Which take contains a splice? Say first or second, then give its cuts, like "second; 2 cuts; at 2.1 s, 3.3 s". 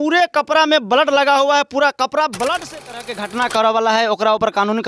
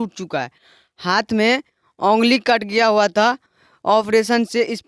first; 1 cut; at 2.9 s